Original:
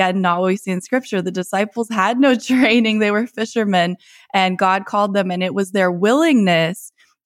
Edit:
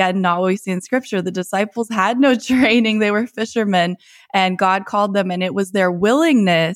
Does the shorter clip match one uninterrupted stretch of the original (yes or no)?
yes